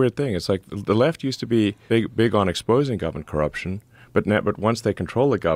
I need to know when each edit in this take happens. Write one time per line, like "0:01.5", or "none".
0:01.8